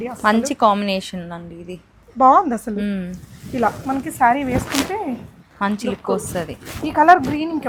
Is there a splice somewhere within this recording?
no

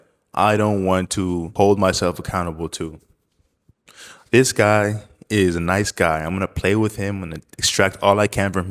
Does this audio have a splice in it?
yes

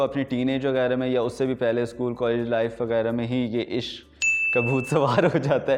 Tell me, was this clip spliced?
no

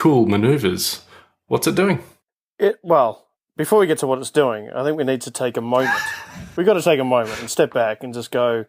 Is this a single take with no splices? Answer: yes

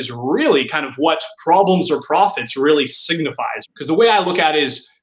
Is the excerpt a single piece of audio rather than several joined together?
no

